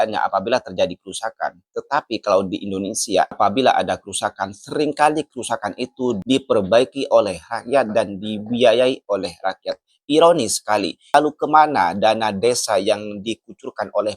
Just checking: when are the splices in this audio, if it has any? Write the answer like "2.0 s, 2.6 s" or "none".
3.4 s, 11.0 s